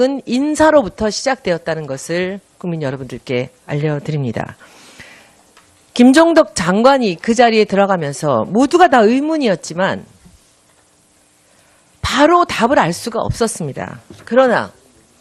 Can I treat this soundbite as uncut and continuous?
no; 1 cut; at 9.1 s

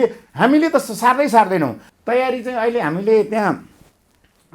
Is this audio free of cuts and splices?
no; 1 cut; at 1.9 s

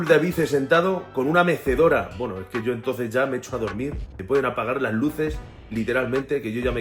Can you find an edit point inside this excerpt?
no; 0 cuts

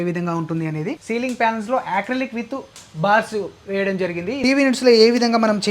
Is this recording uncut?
no; 2 cuts; at 1.0 s, 4.3 s

